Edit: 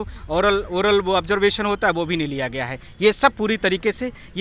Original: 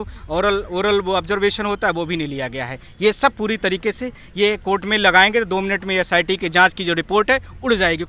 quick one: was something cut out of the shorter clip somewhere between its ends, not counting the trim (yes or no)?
no